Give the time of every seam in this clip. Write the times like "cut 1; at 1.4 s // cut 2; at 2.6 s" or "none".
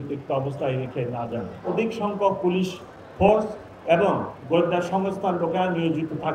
cut 1; at 1.7 s